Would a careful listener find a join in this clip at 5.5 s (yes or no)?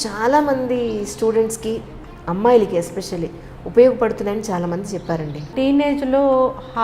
yes